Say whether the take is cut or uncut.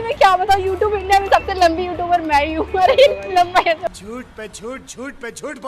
uncut